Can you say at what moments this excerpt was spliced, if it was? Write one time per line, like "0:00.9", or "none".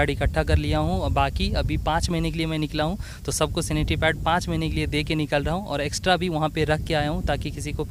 none